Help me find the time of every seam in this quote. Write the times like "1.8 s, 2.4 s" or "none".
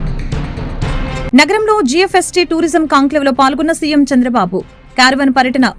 1.0 s